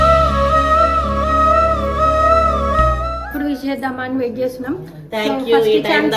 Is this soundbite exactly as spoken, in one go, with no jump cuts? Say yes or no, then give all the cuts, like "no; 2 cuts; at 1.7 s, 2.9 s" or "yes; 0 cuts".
no; 1 cut; at 3.2 s